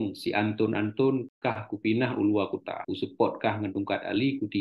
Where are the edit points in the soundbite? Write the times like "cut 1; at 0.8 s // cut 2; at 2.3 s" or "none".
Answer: cut 1; at 1.3 s // cut 2; at 2.8 s